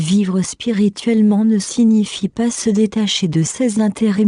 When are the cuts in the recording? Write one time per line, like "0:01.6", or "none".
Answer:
0:01.0